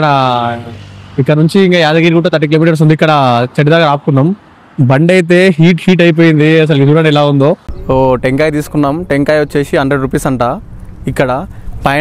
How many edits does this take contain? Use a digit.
1